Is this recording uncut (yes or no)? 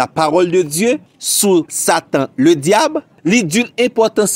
yes